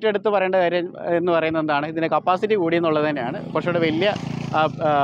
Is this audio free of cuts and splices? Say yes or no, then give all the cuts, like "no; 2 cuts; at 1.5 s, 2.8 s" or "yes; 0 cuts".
yes; 0 cuts